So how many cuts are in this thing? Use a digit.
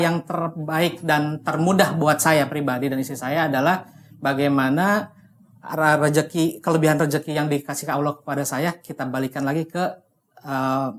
0